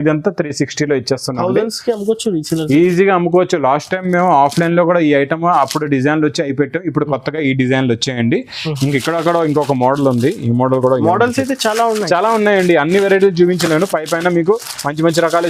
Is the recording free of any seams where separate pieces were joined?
yes; 0 cuts

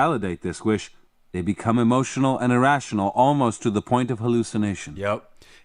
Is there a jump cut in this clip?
no; 0 cuts

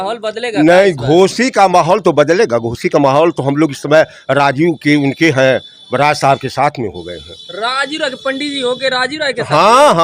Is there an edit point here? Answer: no; 0 cuts

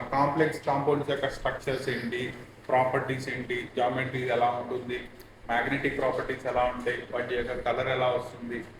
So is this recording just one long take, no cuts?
yes; 0 cuts

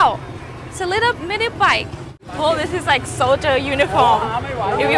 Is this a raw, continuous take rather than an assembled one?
no; 1 cut; at 2.2 s

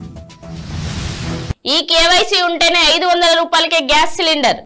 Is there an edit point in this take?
no; 0 cuts

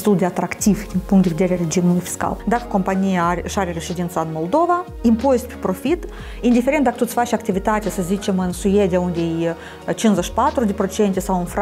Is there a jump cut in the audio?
yes; 1 cut; at 2.4 s

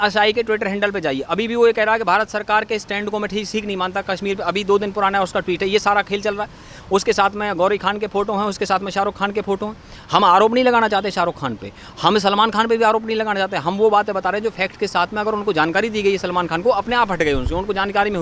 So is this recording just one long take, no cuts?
yes; 0 cuts

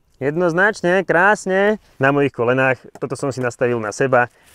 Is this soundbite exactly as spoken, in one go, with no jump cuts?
no; 1 cut; at 1.9 s

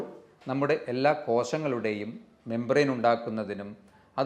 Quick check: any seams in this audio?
no; 0 cuts

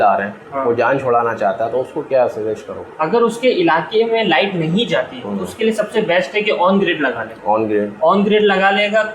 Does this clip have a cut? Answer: no; 0 cuts

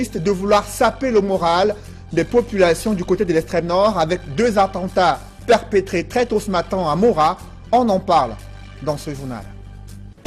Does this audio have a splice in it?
no; 0 cuts

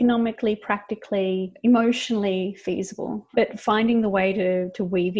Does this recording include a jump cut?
yes; 2 cuts; at 1.5 s, 3.5 s

